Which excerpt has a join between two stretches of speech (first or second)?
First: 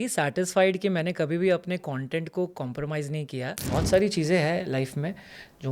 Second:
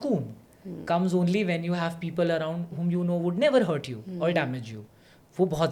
first